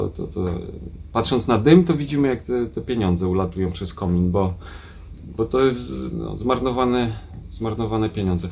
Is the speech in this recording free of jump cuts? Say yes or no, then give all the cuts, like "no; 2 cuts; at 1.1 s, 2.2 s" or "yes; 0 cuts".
yes; 0 cuts